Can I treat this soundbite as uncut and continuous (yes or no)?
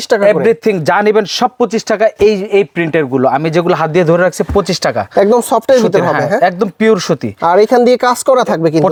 yes